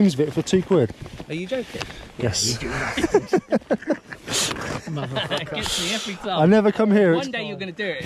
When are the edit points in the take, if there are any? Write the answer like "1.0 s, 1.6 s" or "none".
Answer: none